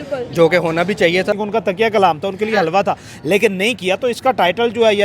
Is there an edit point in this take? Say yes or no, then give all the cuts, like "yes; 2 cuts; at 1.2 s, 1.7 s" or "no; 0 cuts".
yes; 1 cut; at 1.4 s